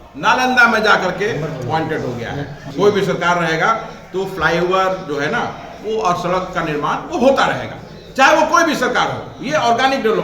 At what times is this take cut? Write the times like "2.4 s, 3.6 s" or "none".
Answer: 2.6 s

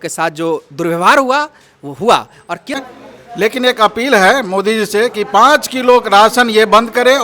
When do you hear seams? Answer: 2.8 s

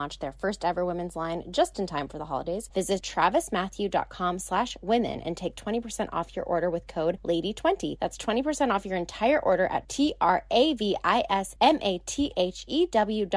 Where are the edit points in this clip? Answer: 2.9 s, 7.2 s, 7.9 s, 11.5 s

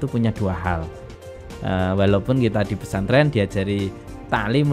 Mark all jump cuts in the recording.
1.3 s

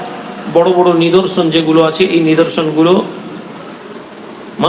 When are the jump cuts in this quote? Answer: none

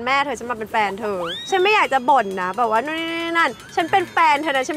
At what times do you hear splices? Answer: none

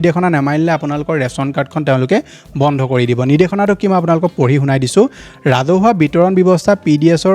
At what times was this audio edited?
none

